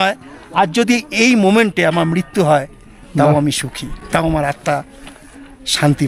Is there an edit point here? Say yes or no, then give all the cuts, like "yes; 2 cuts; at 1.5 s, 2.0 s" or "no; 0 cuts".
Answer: no; 0 cuts